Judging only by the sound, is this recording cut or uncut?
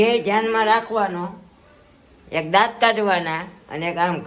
uncut